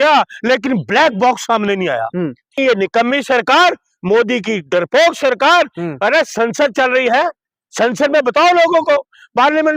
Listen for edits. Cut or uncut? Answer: cut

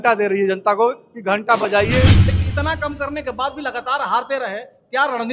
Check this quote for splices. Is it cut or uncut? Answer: cut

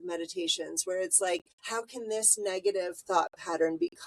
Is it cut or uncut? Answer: cut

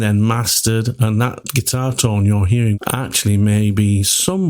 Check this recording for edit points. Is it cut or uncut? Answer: cut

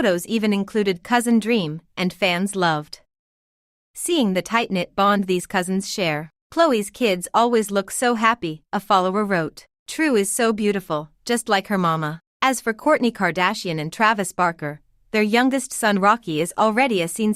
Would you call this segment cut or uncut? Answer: cut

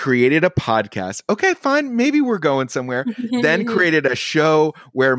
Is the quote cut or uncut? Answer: uncut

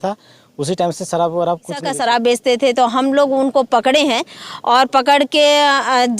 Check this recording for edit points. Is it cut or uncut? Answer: cut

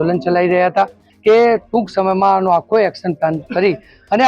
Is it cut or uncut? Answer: cut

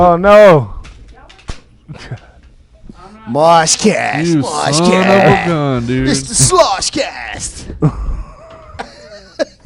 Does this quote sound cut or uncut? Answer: uncut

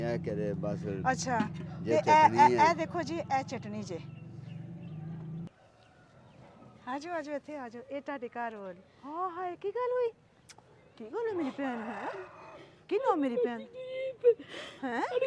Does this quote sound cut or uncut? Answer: cut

